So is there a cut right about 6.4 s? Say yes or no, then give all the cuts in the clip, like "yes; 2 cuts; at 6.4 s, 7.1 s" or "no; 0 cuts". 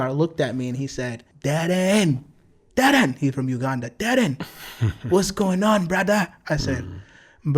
no; 0 cuts